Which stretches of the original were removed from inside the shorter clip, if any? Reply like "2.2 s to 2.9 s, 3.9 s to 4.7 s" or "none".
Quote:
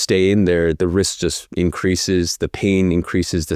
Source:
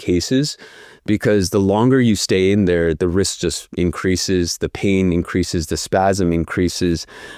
none